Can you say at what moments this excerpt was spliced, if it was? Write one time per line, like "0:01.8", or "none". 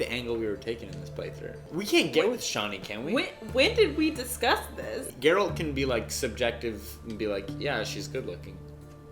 0:01.6
0:04.9